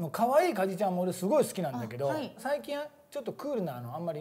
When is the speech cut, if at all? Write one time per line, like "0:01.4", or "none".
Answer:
0:02.4